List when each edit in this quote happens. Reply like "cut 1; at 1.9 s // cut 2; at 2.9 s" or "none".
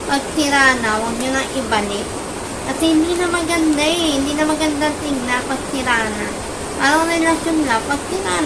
none